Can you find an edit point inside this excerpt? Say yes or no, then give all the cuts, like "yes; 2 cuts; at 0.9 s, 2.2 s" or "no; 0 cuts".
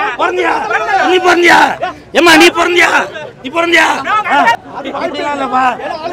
yes; 1 cut; at 4.6 s